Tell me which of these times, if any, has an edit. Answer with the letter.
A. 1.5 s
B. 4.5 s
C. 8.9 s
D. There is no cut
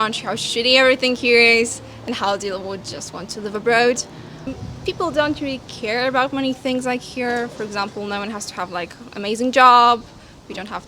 B